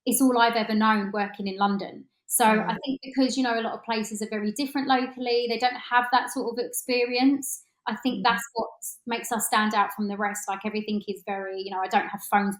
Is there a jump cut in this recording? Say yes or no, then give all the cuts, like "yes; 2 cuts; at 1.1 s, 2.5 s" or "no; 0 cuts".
no; 0 cuts